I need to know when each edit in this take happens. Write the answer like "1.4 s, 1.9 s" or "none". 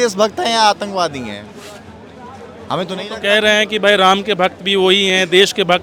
none